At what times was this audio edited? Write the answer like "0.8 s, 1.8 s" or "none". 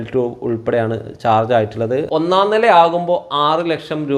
2.1 s